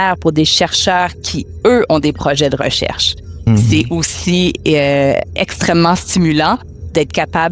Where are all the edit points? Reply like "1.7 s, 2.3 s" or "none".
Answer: 3.4 s